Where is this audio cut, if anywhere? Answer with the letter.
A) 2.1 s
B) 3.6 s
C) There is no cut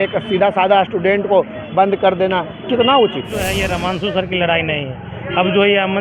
B